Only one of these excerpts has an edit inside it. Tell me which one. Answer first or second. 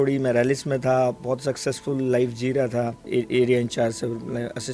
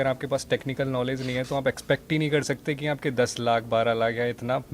first